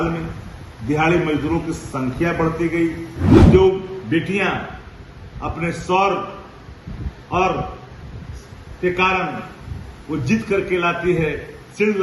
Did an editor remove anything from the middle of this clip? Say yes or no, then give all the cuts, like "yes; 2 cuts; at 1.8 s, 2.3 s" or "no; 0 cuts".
yes; 1 cut; at 3.3 s